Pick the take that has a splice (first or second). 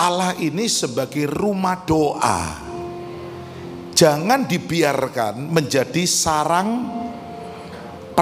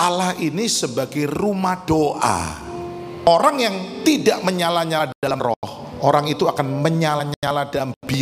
second